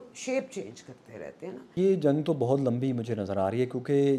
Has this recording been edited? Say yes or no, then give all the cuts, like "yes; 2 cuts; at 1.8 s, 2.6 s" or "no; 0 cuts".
yes; 1 cut; at 1.7 s